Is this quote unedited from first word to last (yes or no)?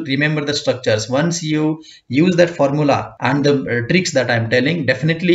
no